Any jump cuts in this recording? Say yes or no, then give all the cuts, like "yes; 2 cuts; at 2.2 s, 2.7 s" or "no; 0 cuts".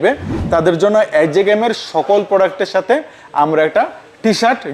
no; 0 cuts